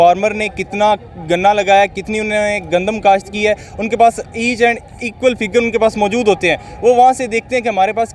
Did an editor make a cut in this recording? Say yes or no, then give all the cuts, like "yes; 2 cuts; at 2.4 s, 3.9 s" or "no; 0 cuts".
no; 0 cuts